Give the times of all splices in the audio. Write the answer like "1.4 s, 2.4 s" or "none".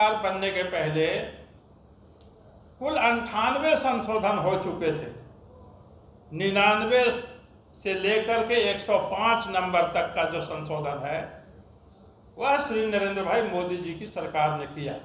none